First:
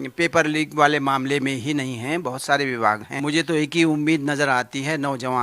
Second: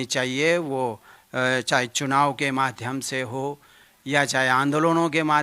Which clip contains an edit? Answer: first; 1 cut; at 3.1 s

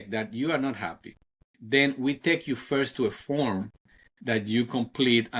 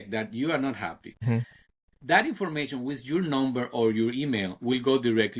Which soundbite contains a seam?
second; 1 cut; at 1.2 s

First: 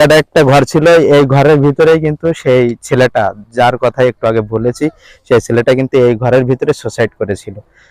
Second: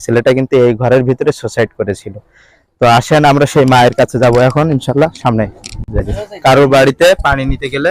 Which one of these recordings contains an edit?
second; 1 cut; at 6.2 s

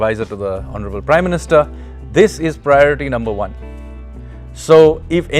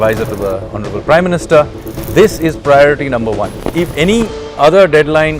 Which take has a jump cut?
second; 1 cut; at 3.7 s

